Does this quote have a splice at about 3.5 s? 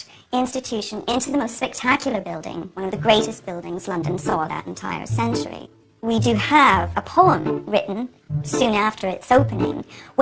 no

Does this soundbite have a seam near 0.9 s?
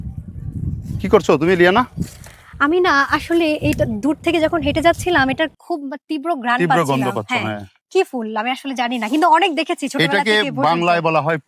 yes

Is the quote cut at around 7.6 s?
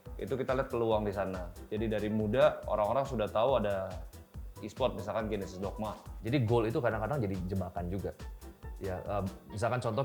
no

